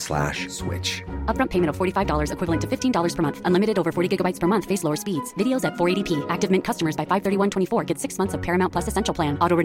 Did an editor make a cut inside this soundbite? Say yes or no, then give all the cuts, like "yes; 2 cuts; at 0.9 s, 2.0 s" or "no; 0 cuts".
no; 0 cuts